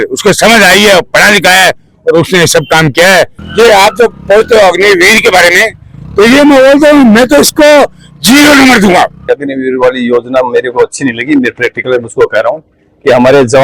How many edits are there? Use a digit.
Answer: 2